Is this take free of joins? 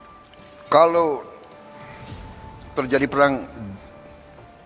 no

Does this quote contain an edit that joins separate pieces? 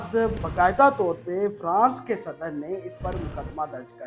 no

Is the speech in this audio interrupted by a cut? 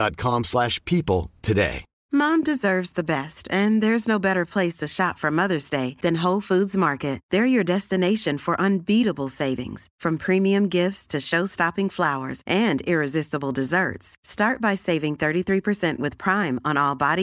yes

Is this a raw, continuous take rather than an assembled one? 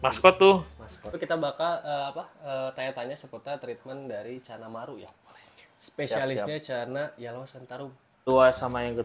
no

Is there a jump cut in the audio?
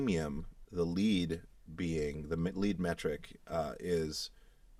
no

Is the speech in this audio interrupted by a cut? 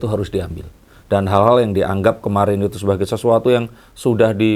no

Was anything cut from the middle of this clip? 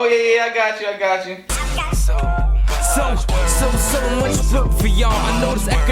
yes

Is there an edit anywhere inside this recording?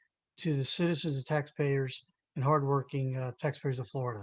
no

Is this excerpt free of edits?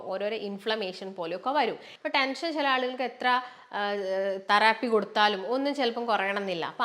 no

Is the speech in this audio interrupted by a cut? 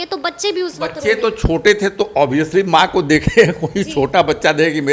no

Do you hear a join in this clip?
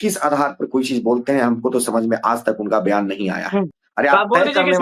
yes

